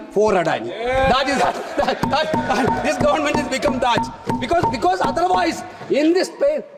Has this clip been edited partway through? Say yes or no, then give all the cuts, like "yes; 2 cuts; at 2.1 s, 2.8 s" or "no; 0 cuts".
no; 0 cuts